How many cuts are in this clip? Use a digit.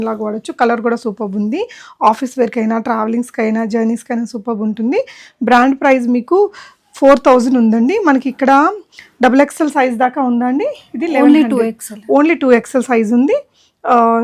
0